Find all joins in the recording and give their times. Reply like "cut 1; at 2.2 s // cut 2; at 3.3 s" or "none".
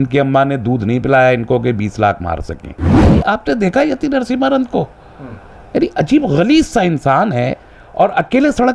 cut 1; at 2.9 s